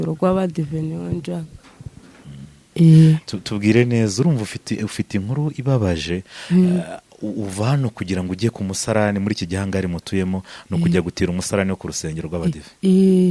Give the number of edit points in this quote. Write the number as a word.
zero